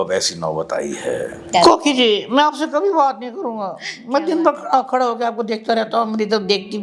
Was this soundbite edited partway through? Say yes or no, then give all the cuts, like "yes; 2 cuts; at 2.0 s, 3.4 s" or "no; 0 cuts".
yes; 1 cut; at 1.5 s